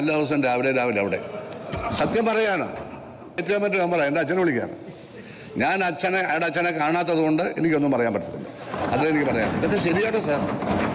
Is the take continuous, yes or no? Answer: no